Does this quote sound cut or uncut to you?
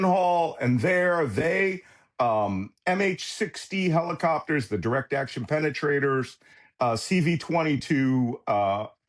uncut